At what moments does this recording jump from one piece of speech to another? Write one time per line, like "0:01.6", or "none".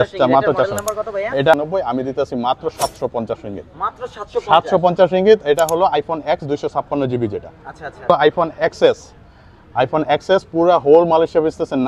0:01.5
0:08.1